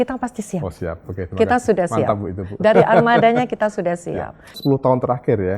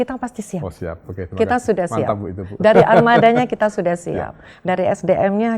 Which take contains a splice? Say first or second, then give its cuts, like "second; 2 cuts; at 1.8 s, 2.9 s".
first; 1 cut; at 4.6 s